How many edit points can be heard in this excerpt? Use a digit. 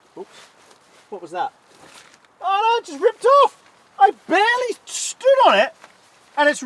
0